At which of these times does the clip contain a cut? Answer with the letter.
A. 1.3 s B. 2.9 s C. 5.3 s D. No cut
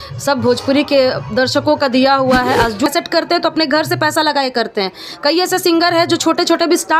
B